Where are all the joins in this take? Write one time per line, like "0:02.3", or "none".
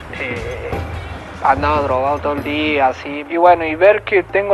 0:03.1